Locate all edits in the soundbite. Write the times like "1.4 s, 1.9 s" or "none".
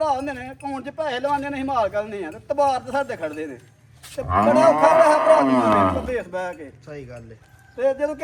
none